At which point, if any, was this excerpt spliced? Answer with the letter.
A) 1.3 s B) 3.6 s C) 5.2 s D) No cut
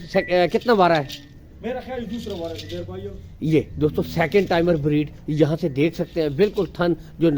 D